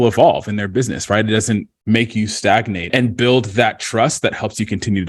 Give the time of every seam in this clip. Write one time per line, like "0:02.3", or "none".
0:02.8